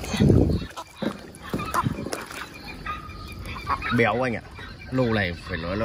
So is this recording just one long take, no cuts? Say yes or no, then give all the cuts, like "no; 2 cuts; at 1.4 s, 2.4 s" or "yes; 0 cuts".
yes; 0 cuts